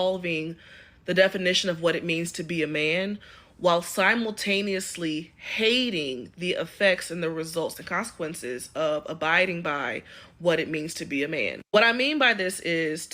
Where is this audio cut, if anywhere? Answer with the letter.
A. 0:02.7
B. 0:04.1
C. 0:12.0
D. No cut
C